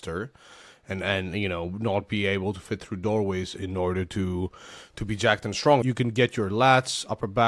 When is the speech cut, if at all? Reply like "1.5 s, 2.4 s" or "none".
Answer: 5.8 s